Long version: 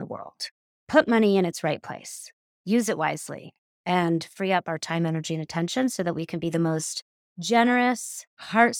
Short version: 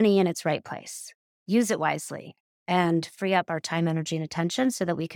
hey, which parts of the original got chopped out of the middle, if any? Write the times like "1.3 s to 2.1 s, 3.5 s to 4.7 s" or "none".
none